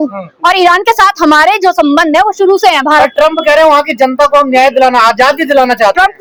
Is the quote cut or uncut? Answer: uncut